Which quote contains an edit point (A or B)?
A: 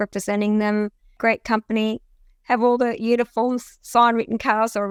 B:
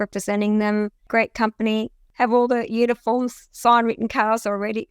B